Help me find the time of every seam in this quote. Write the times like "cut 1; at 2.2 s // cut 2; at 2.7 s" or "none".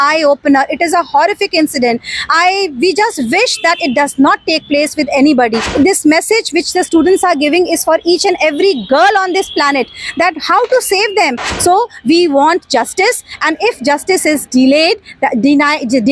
cut 1; at 5.6 s // cut 2; at 11.4 s